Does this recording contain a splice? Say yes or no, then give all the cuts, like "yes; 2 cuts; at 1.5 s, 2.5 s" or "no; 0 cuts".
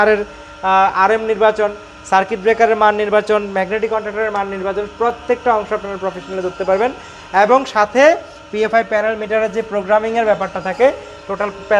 no; 0 cuts